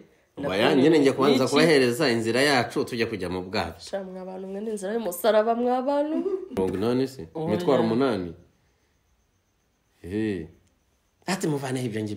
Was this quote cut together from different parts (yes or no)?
yes